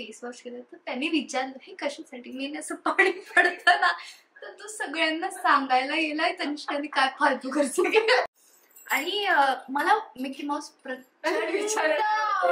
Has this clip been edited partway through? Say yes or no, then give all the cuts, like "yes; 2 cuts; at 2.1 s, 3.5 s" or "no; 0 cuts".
yes; 1 cut; at 8.3 s